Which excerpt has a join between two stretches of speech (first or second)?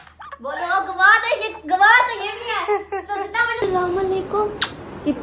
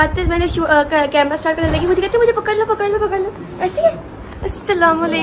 first